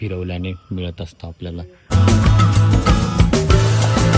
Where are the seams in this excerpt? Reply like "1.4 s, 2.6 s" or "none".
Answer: 1.9 s